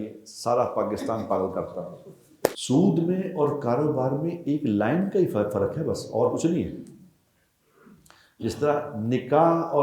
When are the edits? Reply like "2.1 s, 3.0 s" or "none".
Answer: 2.6 s